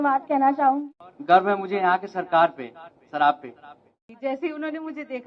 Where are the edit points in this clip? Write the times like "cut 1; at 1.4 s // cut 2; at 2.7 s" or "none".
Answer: cut 1; at 0.8 s // cut 2; at 4.0 s

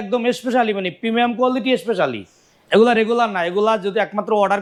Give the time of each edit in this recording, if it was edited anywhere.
none

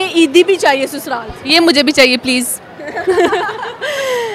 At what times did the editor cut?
none

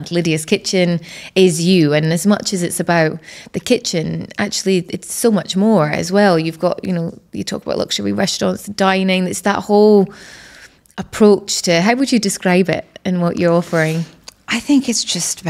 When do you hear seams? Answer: none

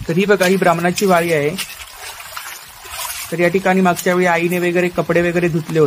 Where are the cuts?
none

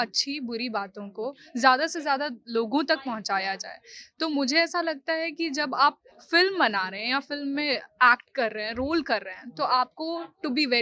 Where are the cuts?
none

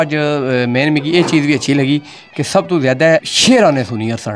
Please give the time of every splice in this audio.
none

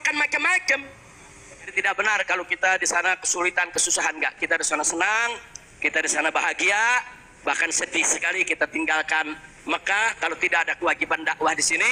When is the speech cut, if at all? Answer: cut 1; at 1.7 s

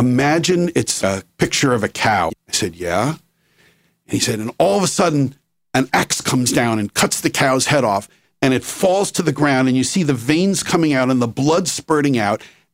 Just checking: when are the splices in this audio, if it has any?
cut 1; at 1.0 s // cut 2; at 2.5 s

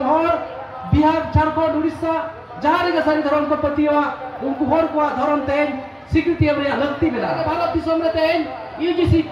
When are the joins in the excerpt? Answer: cut 1; at 7.4 s

